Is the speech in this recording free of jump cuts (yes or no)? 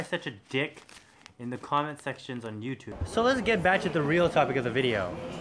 no